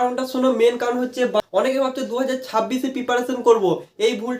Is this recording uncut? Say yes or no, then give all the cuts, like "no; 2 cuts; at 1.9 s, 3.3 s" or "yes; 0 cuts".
no; 1 cut; at 1.4 s